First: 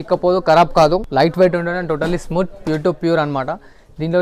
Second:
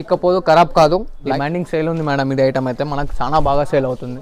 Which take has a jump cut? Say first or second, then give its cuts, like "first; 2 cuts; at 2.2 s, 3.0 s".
second; 1 cut; at 1.1 s